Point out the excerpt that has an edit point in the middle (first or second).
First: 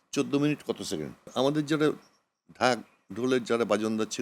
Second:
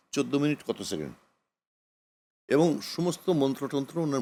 first